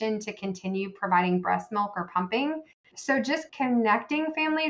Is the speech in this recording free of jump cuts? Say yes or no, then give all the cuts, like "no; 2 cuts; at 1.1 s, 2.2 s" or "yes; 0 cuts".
no; 1 cut; at 2.7 s